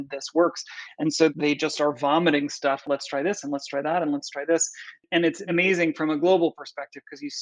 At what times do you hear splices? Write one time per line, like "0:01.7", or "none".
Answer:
0:01.3
0:02.8
0:05.3